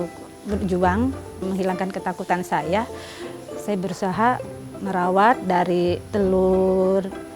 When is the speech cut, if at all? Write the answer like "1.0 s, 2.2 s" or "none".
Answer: 1.4 s